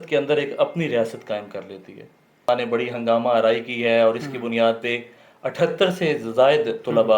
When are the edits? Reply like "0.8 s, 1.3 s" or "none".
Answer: 2.5 s